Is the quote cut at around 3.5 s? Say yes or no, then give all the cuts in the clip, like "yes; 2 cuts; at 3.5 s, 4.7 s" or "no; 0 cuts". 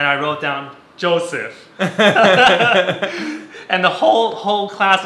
no; 0 cuts